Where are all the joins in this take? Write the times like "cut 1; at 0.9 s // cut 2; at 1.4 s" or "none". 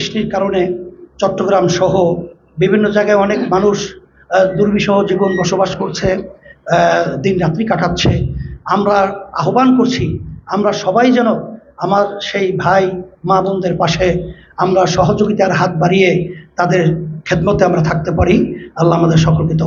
none